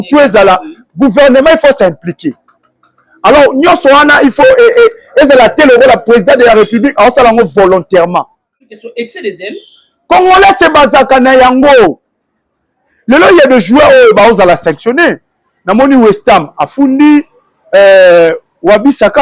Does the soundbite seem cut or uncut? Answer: cut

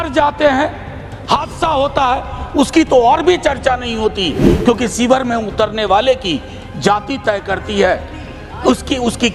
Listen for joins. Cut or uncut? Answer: uncut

